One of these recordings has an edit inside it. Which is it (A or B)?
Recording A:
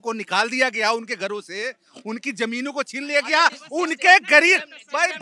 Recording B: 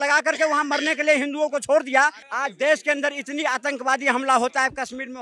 B